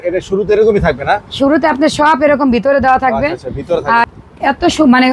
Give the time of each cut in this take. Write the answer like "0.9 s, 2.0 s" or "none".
4.0 s

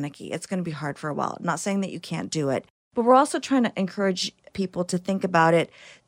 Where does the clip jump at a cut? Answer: 2.8 s

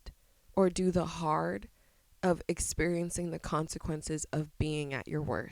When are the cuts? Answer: none

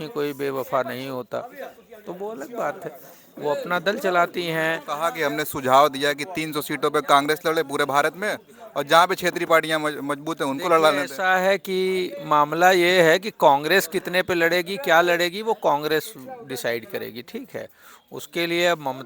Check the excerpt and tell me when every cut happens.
none

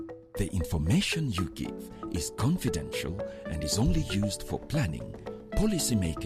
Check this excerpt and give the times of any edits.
none

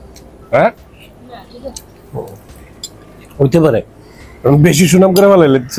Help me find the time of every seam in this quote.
none

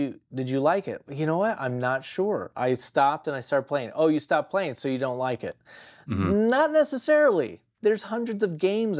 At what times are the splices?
7.7 s

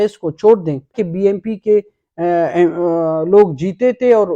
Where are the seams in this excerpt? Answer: 1.0 s

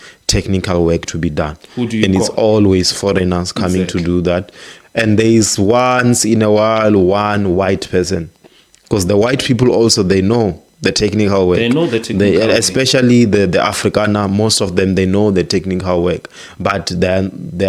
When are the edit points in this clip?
none

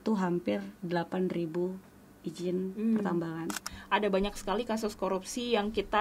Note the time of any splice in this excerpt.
3.8 s

